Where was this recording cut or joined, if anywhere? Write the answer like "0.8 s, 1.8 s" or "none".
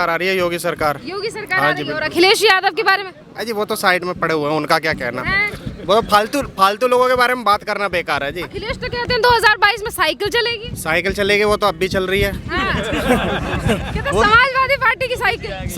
none